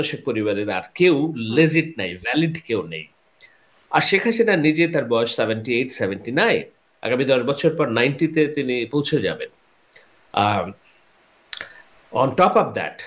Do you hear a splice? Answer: no; 0 cuts

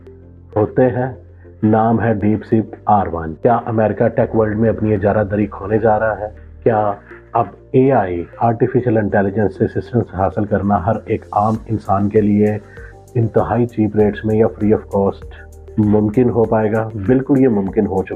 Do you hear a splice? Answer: no; 0 cuts

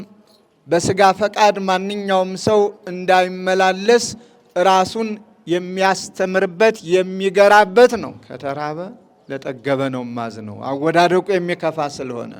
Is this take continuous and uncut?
no; 1 cut; at 8.2 s

